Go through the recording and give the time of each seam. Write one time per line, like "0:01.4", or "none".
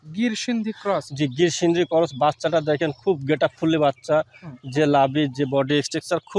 none